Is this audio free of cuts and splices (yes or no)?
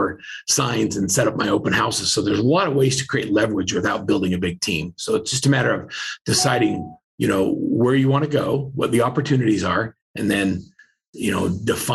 yes